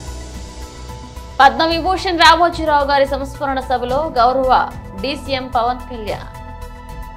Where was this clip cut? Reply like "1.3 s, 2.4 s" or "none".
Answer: 1.4 s, 6.2 s